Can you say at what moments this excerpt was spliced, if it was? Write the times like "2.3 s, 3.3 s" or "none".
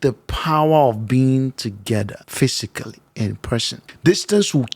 2.2 s, 3.8 s